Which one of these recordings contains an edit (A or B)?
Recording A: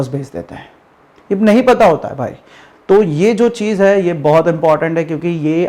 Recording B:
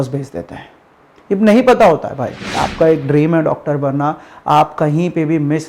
B